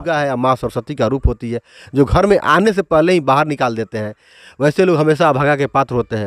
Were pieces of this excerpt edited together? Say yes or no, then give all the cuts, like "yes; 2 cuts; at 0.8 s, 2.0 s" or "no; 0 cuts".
no; 0 cuts